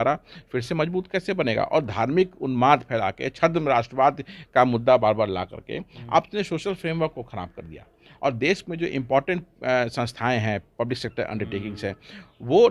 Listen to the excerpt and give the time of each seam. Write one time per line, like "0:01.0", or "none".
none